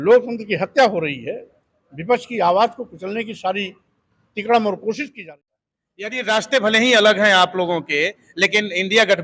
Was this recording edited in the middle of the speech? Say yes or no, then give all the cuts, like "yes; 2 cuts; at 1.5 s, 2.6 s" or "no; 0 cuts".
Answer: yes; 1 cut; at 5.1 s